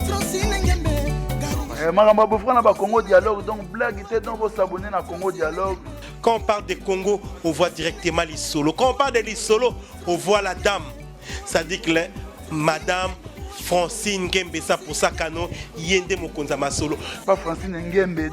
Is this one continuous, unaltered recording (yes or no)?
no